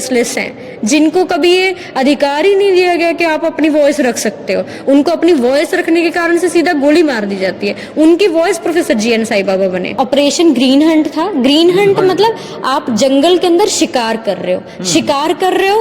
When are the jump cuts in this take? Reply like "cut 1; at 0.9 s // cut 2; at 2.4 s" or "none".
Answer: cut 1; at 9.9 s